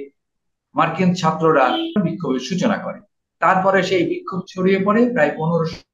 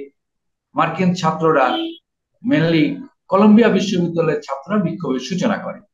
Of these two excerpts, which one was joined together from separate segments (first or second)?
first